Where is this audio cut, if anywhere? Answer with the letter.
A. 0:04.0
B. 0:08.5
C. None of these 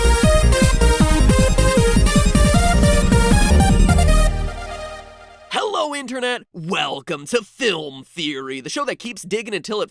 A